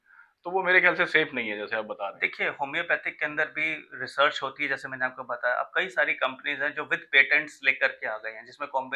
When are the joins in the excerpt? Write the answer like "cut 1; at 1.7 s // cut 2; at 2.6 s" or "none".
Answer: none